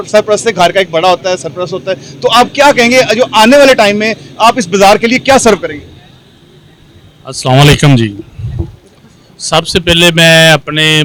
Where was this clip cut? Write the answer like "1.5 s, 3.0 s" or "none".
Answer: none